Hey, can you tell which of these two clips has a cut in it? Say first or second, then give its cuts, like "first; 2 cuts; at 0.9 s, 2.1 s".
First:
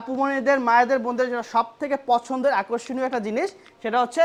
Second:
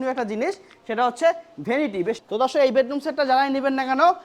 second; 1 cut; at 2.2 s